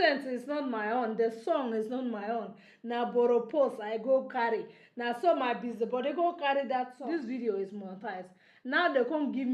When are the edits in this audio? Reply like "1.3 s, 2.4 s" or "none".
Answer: 7.0 s